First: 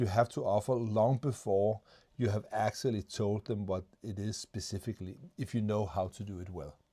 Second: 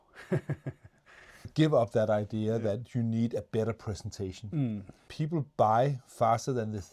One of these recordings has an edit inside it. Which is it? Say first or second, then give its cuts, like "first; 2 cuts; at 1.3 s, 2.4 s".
second; 2 cuts; at 1.5 s, 5.0 s